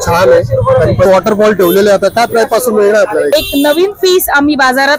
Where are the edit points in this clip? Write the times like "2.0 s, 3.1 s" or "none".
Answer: 1.1 s, 3.3 s